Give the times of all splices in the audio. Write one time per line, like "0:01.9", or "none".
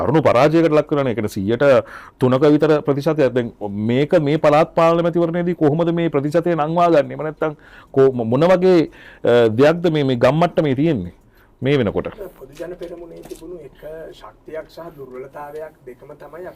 none